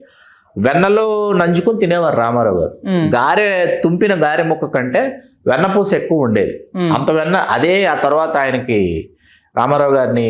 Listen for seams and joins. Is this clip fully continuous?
yes; 0 cuts

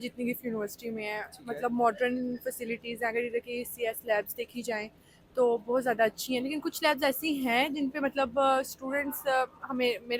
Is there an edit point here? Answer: no; 0 cuts

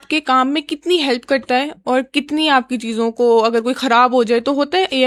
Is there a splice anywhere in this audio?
no; 0 cuts

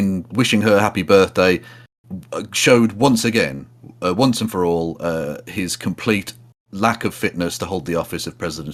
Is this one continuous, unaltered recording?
yes; 0 cuts

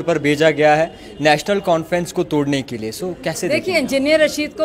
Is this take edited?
no; 0 cuts

